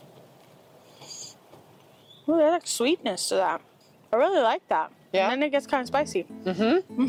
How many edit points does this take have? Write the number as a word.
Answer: zero